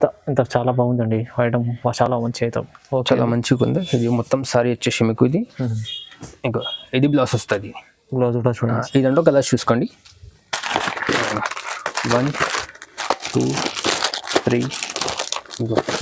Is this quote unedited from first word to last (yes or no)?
yes